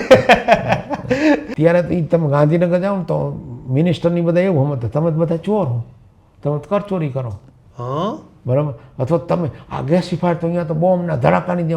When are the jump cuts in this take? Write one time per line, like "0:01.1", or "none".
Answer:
0:01.5